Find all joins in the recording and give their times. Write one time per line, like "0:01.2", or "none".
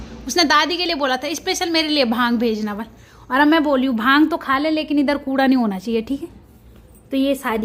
none